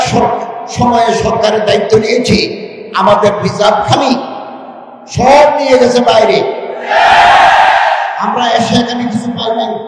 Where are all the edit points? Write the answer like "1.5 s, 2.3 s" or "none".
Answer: none